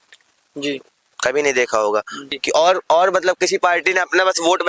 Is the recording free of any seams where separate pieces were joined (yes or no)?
no